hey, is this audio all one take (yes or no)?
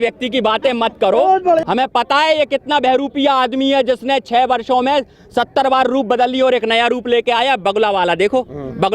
no